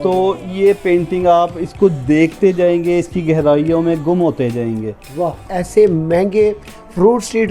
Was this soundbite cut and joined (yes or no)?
yes